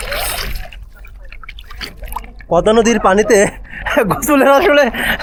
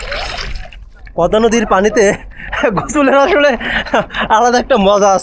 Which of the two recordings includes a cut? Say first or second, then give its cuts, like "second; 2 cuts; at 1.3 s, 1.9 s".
second; 1 cut; at 1.0 s